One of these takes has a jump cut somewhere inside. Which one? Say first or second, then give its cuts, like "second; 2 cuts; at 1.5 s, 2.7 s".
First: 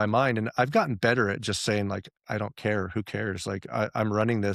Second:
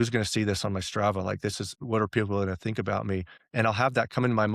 second; 2 cuts; at 1.7 s, 3.4 s